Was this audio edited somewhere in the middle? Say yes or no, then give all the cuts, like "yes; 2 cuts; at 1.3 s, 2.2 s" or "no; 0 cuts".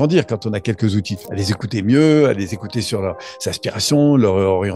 yes; 1 cut; at 1.2 s